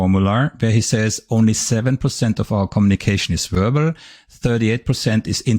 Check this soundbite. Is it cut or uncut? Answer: uncut